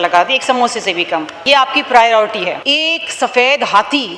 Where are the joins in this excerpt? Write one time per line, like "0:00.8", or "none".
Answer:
0:01.4
0:02.6